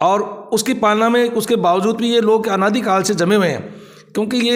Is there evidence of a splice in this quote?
no; 0 cuts

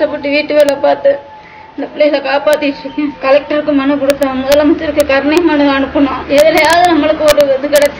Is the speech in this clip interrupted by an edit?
yes; 2 cuts; at 3.2 s, 6.2 s

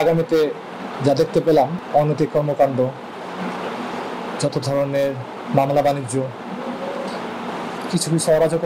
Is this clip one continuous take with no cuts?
no; 1 cut; at 1.8 s

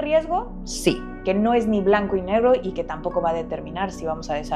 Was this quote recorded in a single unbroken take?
yes; 0 cuts

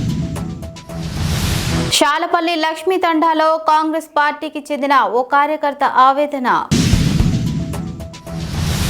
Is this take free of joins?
no; 1 cut; at 1.9 s

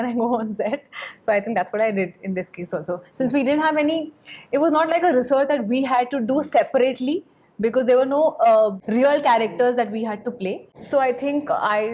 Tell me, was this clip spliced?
no; 0 cuts

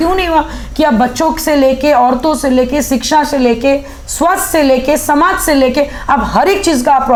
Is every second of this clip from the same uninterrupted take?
yes; 0 cuts

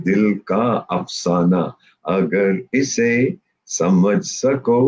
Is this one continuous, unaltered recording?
yes; 0 cuts

